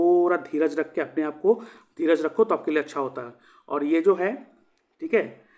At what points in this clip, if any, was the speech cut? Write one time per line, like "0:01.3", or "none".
none

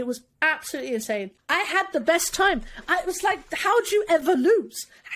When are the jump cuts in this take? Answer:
0:01.3

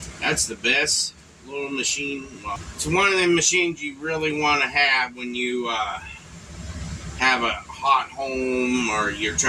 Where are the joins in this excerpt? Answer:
0:02.6

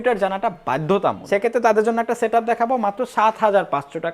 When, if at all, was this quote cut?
0:01.2

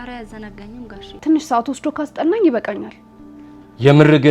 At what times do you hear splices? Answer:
0:01.1

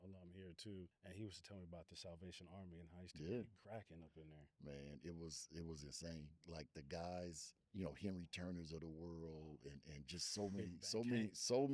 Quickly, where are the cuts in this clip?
0:01.0
0:06.4
0:07.6

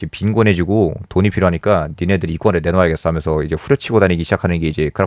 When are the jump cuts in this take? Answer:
none

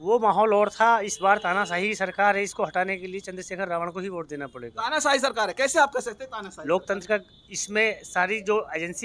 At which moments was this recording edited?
none

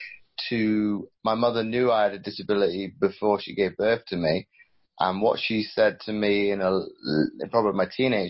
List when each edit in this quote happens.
none

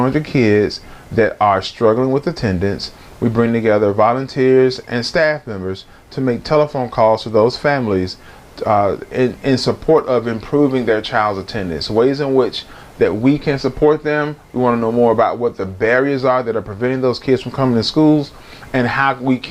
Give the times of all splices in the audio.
none

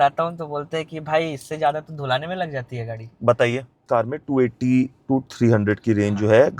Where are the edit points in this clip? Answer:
0:03.8

